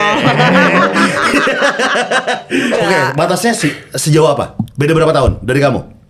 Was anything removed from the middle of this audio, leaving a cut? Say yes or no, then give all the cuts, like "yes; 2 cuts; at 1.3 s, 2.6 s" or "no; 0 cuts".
yes; 1 cut; at 2.8 s